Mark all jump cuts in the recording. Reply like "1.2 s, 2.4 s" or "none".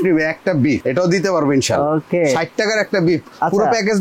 none